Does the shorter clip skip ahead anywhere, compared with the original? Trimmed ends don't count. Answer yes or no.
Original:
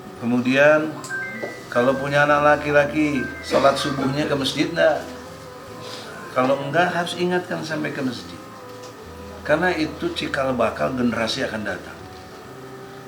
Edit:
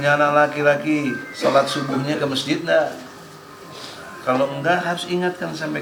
no